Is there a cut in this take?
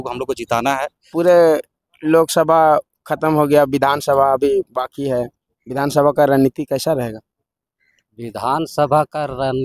yes; 1 cut; at 1.1 s

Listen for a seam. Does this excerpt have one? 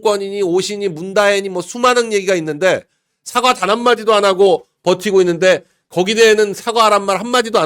no; 0 cuts

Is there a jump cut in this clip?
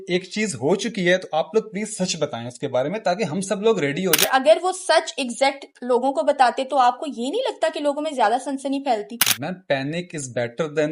yes; 1 cut; at 4.3 s

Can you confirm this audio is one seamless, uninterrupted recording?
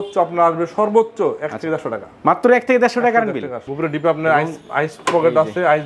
no; 1 cut; at 3.7 s

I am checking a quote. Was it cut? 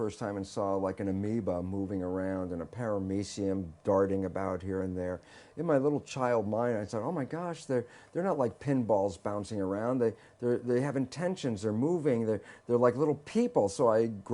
yes; 1 cut; at 9.0 s

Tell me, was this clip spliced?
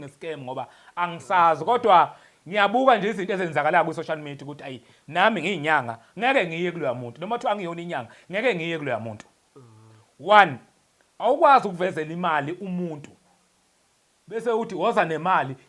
no; 0 cuts

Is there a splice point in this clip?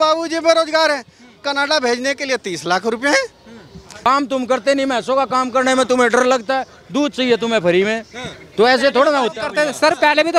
yes; 1 cut; at 4.1 s

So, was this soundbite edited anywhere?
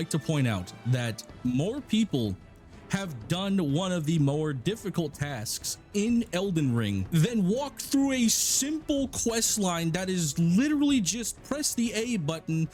no; 0 cuts

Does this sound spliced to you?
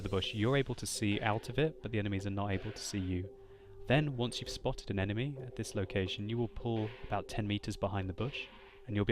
yes; 1 cut; at 7.0 s

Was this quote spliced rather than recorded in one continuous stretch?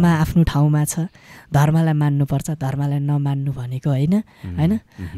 no; 0 cuts

